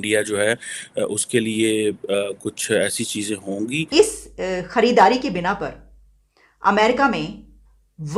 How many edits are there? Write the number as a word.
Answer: one